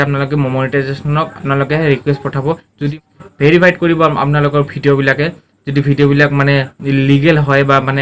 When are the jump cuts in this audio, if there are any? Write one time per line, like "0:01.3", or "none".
0:02.9

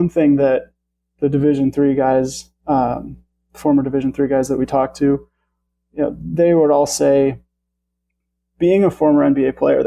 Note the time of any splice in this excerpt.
none

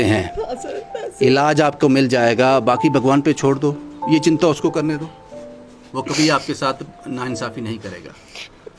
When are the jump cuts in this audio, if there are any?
none

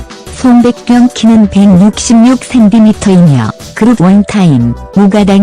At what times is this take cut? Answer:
0:03.1

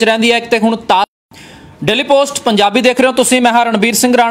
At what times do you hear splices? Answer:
0:01.1

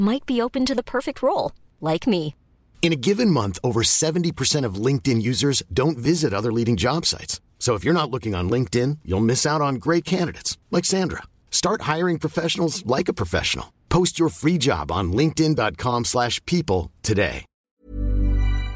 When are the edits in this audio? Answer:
0:17.8

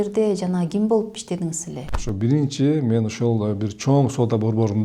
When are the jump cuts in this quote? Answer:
0:02.0

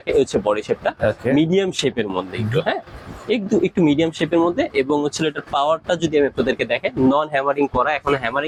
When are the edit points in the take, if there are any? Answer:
none

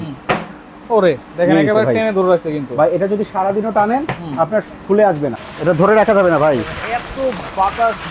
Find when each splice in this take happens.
0:05.4

